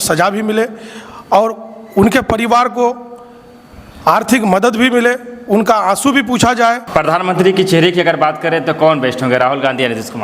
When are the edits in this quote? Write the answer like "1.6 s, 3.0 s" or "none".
6.8 s